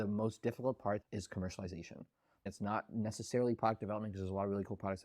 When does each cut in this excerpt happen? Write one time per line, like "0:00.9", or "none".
0:01.0
0:02.5